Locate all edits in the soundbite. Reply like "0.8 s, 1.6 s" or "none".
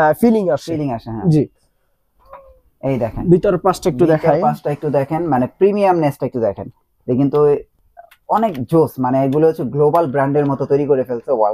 none